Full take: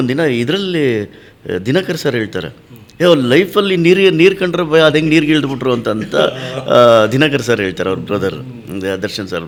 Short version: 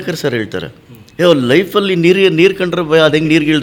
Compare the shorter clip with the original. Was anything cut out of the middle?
no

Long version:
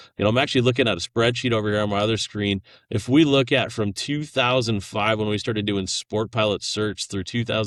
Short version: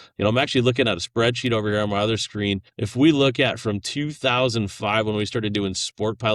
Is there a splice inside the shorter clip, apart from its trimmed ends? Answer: yes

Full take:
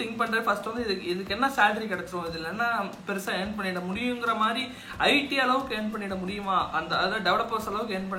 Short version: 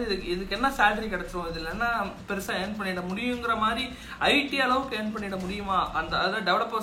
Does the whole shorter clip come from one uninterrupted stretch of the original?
yes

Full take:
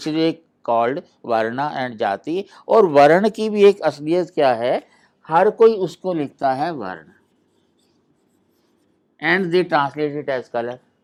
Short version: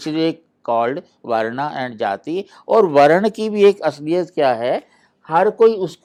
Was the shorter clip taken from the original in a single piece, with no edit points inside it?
yes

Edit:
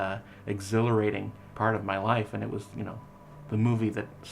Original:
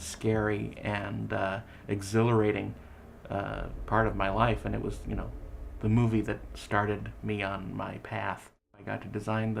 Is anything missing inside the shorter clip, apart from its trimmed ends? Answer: yes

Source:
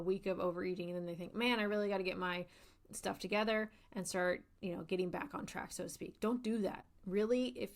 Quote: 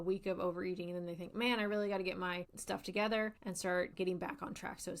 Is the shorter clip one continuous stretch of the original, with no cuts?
no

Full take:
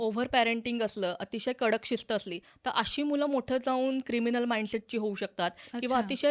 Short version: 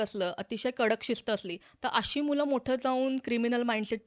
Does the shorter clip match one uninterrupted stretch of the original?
yes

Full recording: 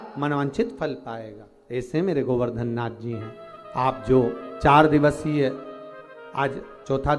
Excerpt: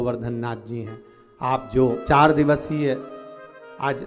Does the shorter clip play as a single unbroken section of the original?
no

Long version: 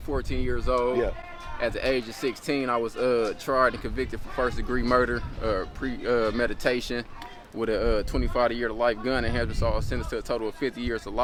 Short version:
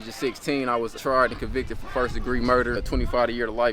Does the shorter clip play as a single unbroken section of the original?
no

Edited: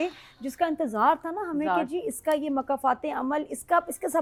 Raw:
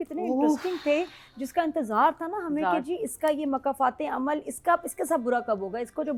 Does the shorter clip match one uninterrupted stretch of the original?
yes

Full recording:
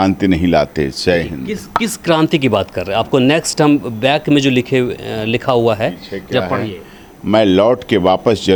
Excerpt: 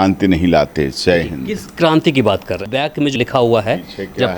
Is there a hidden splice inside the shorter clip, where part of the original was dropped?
yes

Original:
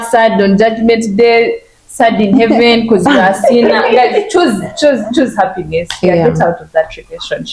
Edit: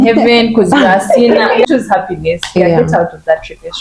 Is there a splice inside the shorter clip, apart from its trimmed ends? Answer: yes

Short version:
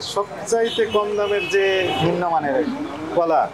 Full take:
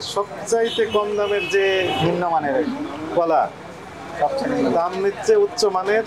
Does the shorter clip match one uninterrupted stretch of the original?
yes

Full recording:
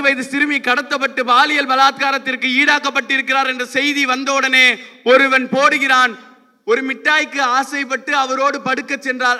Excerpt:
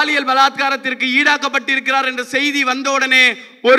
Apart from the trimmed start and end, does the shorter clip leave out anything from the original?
no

